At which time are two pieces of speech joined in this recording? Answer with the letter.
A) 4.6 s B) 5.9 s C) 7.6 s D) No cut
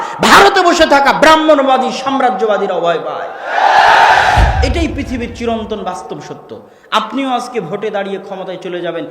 A